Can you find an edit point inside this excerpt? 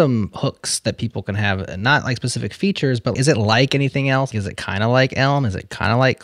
yes; 2 cuts; at 3.1 s, 4.3 s

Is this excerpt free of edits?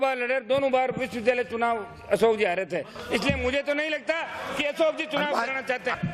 yes; 0 cuts

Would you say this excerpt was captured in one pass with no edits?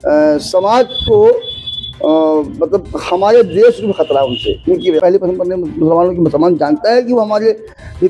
no; 1 cut; at 5.0 s

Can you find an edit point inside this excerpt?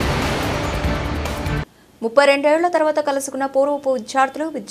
yes; 1 cut; at 1.6 s

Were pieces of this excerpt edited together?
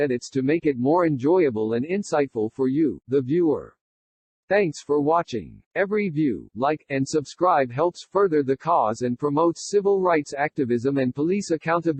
no; 0 cuts

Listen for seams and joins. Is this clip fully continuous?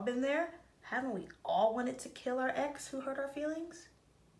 yes; 0 cuts

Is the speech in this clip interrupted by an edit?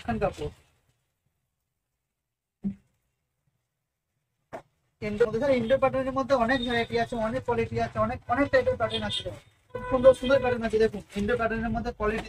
no; 0 cuts

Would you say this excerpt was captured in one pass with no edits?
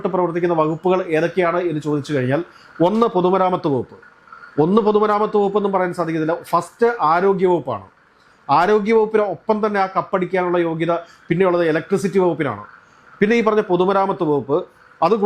yes; 0 cuts

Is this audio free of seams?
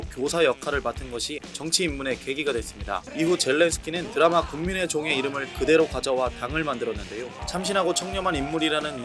no; 4 cuts; at 1.5 s, 3.1 s, 4.0 s, 7.4 s

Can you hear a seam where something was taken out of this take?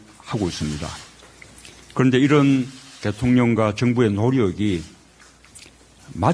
yes; 1 cut; at 2.1 s

